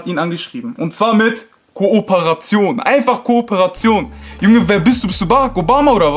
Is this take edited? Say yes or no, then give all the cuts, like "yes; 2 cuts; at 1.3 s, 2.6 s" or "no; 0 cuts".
no; 0 cuts